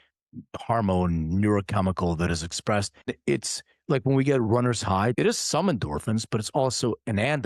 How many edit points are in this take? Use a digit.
2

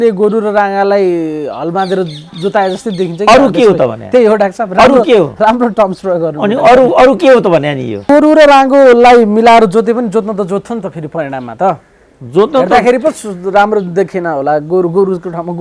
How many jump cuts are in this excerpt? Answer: 1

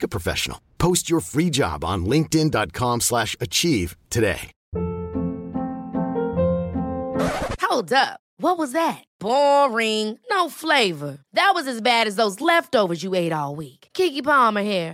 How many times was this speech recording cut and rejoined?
1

